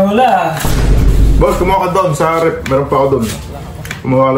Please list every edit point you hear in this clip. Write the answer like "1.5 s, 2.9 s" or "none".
1.0 s